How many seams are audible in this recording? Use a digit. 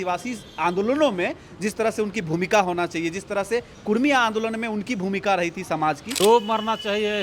1